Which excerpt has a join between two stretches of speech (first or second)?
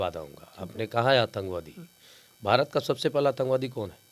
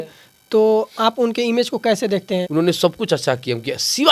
second